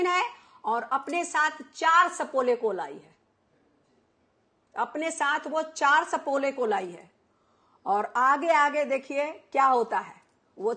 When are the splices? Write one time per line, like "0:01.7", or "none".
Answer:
none